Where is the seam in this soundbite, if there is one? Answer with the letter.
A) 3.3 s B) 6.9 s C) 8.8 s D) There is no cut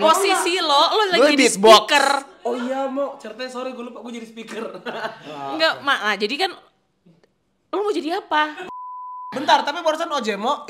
C